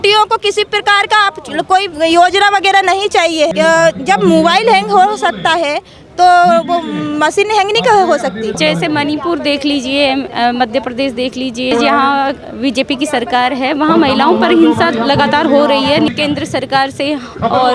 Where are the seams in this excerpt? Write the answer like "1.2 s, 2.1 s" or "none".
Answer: 3.5 s, 8.6 s, 11.7 s, 16.1 s